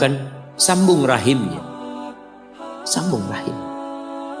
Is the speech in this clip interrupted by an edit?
yes; 2 cuts; at 1.6 s, 2.9 s

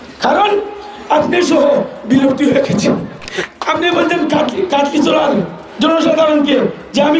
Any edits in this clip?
yes; 1 cut; at 3.4 s

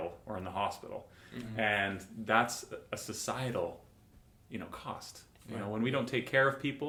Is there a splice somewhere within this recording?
no; 0 cuts

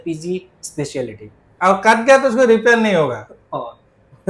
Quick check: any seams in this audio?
yes; 1 cut; at 1.5 s

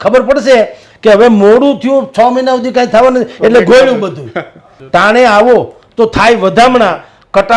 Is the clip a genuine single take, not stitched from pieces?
no; 1 cut; at 4.7 s

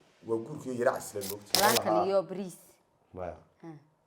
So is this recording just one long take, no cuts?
no; 1 cut; at 1.5 s

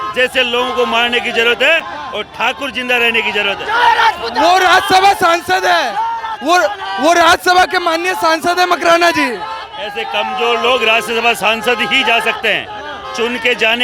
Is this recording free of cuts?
yes; 0 cuts

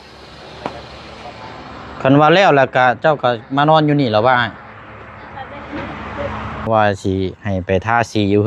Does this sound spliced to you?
yes; 1 cut; at 6.7 s

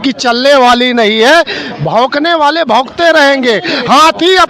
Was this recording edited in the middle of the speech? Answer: no; 0 cuts

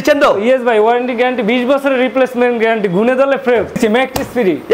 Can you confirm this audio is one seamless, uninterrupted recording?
no; 1 cut; at 3.8 s

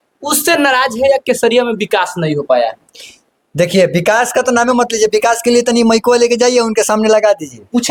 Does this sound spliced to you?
no; 0 cuts

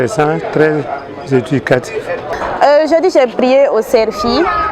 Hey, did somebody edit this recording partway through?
yes; 1 cut; at 2.3 s

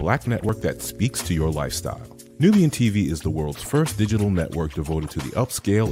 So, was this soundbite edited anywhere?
no; 0 cuts

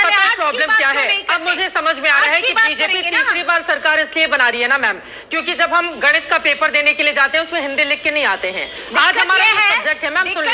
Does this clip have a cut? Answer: no; 0 cuts

